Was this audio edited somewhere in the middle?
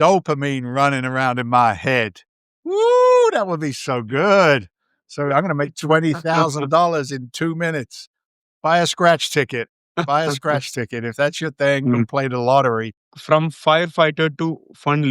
yes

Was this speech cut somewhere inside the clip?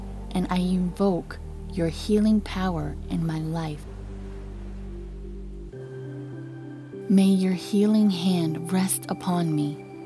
yes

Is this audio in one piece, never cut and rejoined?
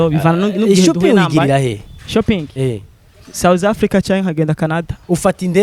yes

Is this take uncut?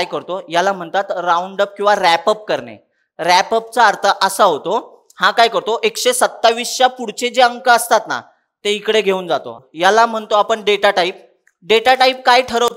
no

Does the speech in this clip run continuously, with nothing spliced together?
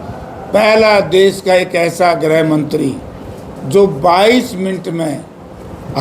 yes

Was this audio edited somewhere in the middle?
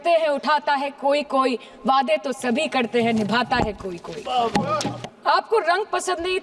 yes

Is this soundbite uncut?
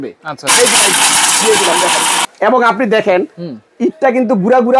no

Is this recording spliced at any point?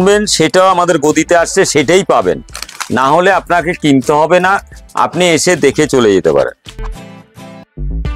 yes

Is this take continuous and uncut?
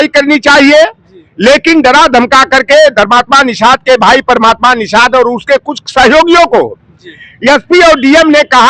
yes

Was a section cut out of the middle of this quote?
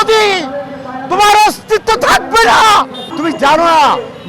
yes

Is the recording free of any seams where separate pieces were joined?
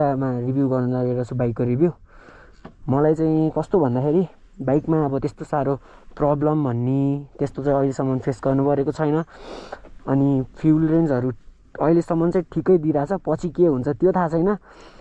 yes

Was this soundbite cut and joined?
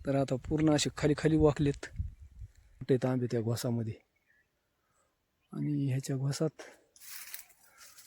yes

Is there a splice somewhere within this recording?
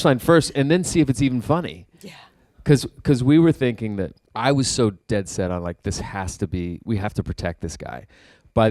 yes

